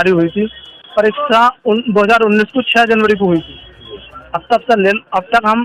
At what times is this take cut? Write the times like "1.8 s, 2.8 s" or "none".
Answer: none

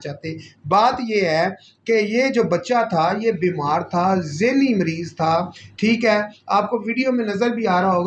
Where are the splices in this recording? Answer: none

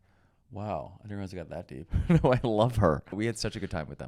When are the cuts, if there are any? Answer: 3.2 s

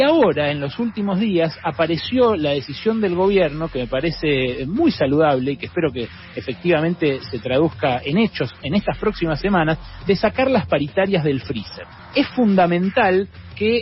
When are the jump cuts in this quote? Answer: 12.0 s

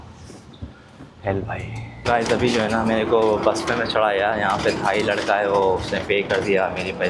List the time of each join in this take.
2.1 s

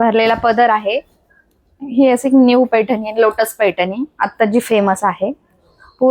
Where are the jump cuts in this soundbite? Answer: 1.1 s

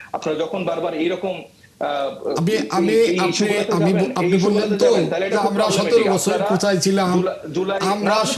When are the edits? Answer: none

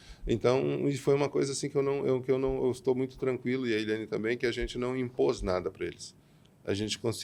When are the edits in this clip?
none

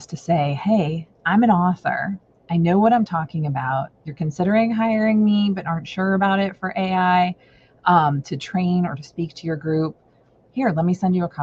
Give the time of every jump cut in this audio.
none

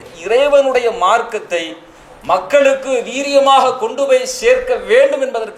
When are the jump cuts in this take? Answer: none

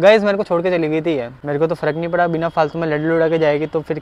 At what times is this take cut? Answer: 1.3 s

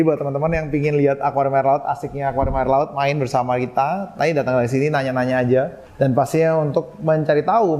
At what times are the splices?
5.8 s

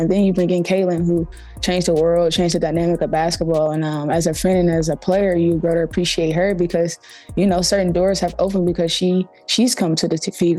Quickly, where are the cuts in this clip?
none

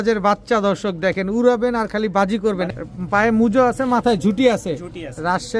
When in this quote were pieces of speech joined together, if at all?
2.7 s

